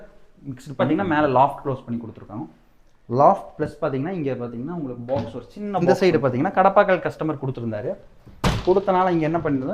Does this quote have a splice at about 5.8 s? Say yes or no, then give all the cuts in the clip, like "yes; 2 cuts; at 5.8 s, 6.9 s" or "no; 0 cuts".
yes; 2 cuts; at 0.8 s, 5.8 s